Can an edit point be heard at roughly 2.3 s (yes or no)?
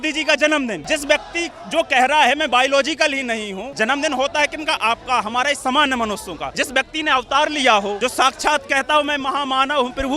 no